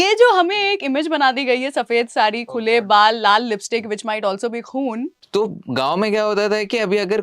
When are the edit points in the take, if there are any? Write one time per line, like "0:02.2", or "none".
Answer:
0:05.1